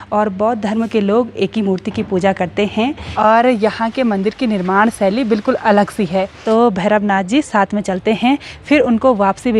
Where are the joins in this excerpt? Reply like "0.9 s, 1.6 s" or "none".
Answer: 3.0 s, 6.4 s